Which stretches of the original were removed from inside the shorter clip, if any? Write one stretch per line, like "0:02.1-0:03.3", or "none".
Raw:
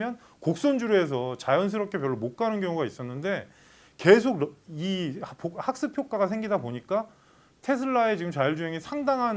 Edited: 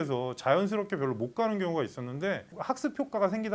0:03.5-0:05.5